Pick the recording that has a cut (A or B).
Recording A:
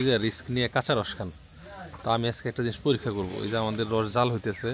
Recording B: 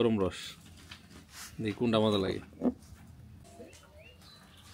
B